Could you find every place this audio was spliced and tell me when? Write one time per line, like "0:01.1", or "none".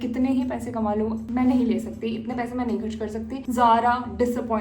0:03.4